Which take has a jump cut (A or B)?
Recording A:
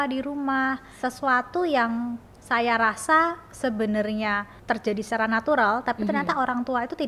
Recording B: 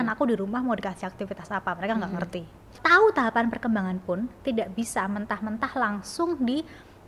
B